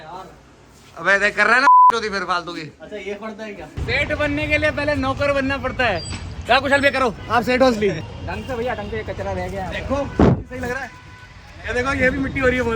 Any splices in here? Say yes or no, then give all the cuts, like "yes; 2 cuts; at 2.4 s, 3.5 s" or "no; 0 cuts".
yes; 2 cuts; at 3.8 s, 8.0 s